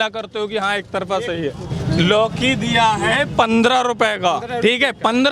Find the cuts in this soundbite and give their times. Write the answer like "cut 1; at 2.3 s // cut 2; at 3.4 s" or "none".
cut 1; at 1.7 s